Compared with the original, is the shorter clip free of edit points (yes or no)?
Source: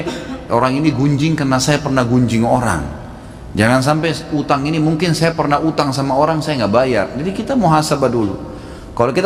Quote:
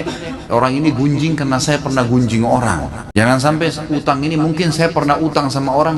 no